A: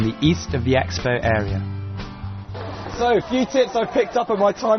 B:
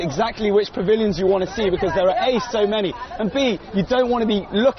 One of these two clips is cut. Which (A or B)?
A